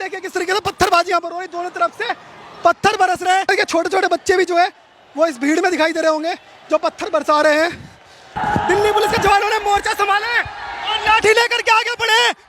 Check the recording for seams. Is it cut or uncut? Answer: cut